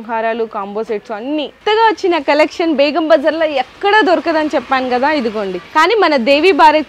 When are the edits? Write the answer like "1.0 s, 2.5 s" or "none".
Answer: 1.6 s, 5.6 s